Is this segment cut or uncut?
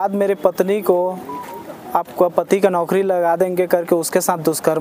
uncut